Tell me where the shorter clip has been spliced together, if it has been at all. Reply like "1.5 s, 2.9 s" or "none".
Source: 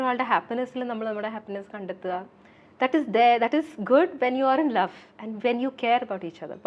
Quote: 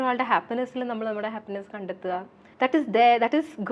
2.4 s

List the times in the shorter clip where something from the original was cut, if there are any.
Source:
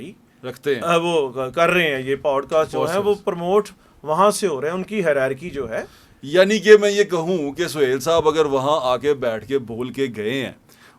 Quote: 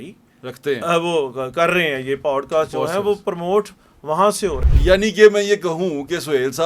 4.6 s

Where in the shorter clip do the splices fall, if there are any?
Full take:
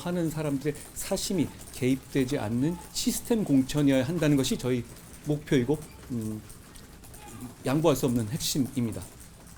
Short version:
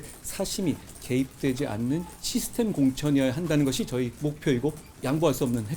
4.1 s, 4.9 s

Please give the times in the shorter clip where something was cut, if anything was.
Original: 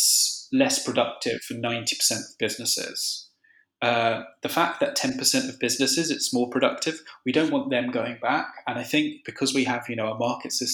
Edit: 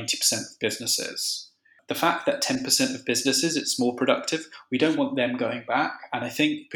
1.8 s

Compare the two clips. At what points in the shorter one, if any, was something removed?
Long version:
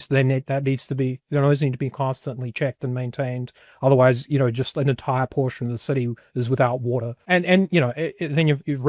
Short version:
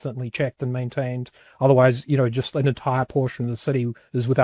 none

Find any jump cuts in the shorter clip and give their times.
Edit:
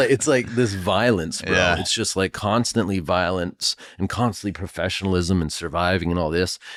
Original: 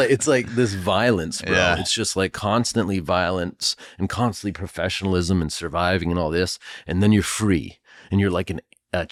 none

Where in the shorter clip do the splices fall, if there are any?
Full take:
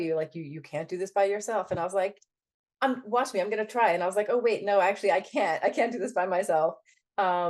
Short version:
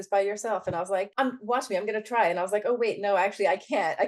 1.1 s

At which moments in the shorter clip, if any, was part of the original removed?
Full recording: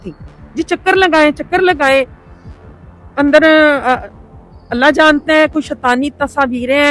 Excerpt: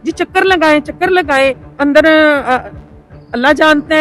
1.7 s

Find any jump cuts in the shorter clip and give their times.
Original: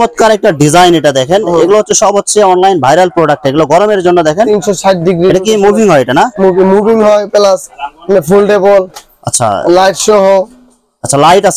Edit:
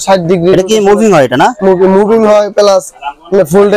none

